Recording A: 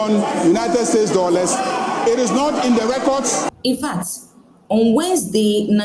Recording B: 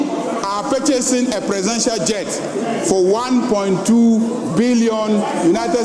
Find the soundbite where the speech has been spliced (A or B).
A